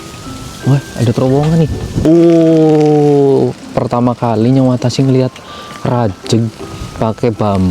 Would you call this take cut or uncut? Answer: cut